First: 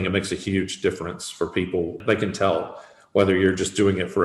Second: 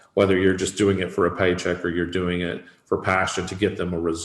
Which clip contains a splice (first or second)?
first